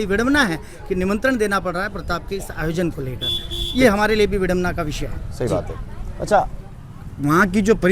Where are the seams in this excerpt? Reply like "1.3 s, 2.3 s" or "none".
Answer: none